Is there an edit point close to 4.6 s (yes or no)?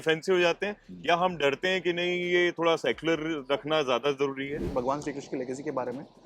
yes